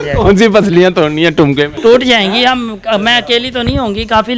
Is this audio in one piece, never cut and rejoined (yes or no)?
no